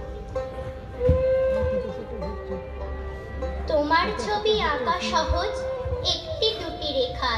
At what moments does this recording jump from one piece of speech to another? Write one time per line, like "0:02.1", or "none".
none